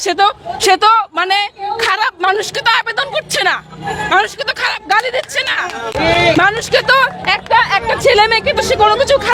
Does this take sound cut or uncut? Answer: uncut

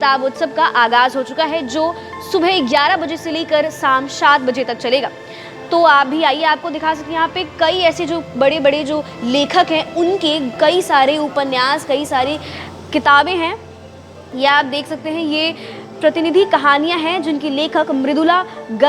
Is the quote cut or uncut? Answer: uncut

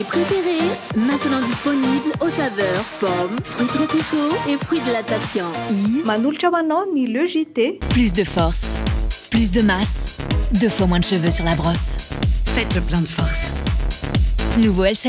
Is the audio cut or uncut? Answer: cut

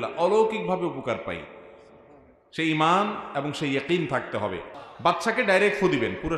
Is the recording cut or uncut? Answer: cut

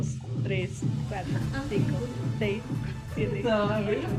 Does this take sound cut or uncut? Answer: uncut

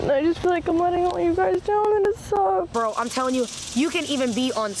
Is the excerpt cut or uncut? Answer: cut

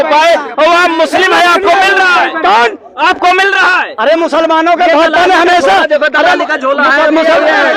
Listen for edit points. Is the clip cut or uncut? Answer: uncut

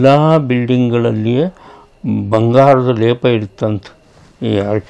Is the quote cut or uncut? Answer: uncut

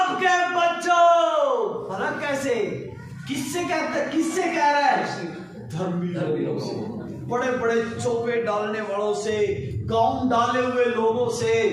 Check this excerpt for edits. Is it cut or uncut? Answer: uncut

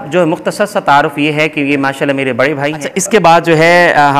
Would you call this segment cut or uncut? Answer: cut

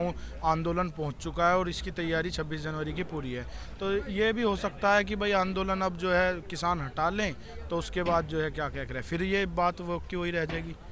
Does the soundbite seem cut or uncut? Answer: uncut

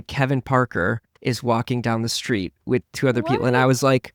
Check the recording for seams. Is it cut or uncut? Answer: uncut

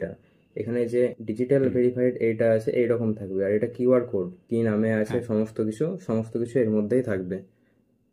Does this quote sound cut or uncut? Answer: cut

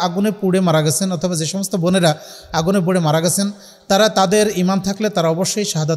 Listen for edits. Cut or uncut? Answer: uncut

